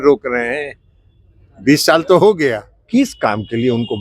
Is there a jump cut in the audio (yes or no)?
yes